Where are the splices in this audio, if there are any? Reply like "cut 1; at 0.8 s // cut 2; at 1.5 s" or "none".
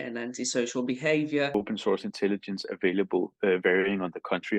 cut 1; at 1.5 s